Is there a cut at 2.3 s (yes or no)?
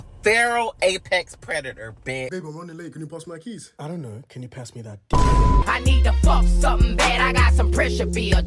yes